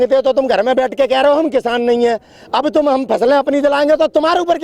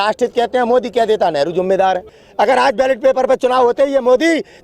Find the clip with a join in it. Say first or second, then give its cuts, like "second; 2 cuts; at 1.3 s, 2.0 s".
second; 1 cut; at 2.2 s